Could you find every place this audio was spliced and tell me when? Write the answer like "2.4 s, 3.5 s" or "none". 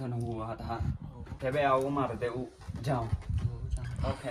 1.2 s